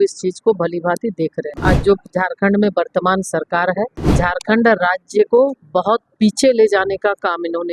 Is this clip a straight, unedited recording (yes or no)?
no